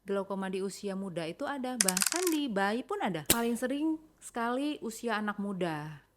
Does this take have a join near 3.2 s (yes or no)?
yes